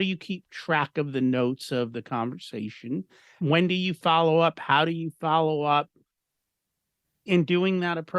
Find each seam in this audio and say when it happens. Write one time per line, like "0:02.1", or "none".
0:03.4
0:07.3